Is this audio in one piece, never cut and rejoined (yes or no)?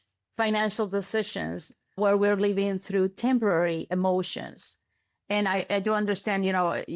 yes